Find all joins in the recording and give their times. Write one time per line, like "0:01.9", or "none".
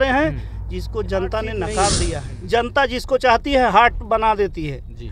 0:02.3